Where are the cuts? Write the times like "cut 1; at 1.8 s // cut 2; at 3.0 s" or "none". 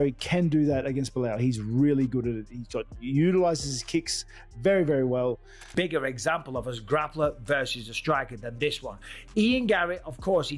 cut 1; at 5.6 s